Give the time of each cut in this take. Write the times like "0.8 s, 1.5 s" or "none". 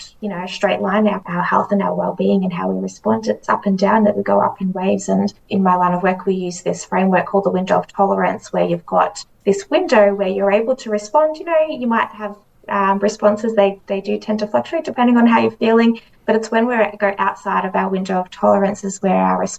1.2 s, 5.4 s, 9.3 s